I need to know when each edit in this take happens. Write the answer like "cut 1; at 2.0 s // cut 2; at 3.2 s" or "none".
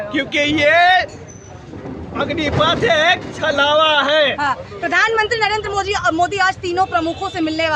none